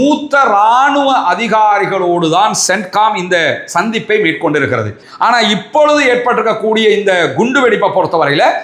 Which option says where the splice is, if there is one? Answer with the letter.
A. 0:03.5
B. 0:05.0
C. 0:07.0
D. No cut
B